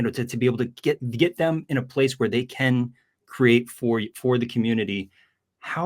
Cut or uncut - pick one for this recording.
uncut